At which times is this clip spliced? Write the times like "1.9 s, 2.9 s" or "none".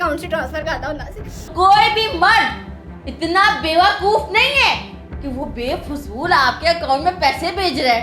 1.5 s